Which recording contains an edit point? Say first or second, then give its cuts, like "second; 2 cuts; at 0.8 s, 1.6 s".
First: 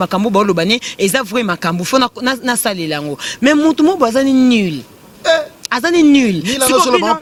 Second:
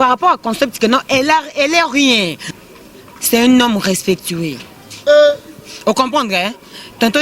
second; 1 cut; at 2.4 s